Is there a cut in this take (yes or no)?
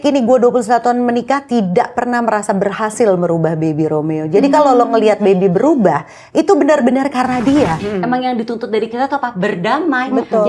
yes